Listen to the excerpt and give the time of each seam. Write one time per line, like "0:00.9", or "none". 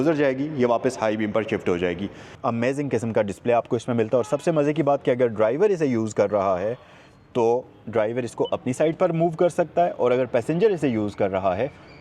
0:02.3